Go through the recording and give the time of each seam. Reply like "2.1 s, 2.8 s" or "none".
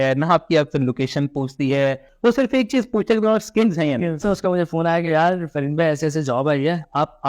2.1 s, 4.2 s